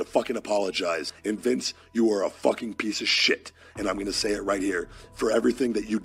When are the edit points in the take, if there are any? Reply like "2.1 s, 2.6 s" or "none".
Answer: none